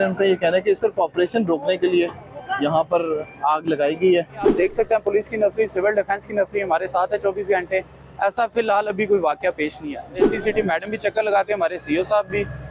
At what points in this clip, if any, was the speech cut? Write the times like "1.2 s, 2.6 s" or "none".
4.5 s, 10.2 s